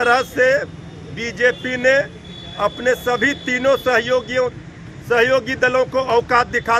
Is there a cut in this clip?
no; 0 cuts

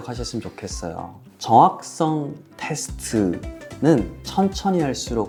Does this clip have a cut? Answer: no; 0 cuts

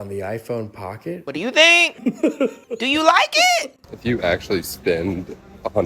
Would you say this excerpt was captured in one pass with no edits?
no; 3 cuts; at 1.2 s, 2.6 s, 3.9 s

